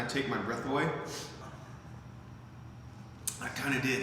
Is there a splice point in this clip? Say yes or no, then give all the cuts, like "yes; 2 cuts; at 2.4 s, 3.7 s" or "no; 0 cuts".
yes; 1 cut; at 1.4 s